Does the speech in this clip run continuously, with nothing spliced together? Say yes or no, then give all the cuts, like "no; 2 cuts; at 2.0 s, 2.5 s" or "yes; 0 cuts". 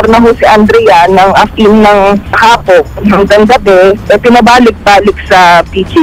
no; 1 cut; at 1.5 s